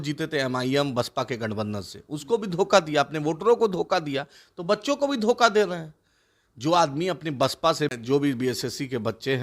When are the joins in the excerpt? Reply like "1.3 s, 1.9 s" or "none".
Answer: 7.9 s